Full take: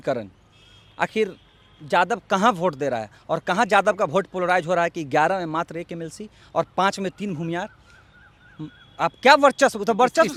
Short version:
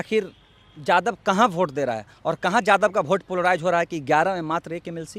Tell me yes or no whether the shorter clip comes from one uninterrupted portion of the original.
yes